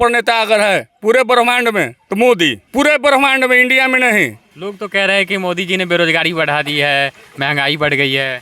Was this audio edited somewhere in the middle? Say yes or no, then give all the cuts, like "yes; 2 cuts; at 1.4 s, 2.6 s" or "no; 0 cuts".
yes; 3 cuts; at 2.0 s, 2.6 s, 4.5 s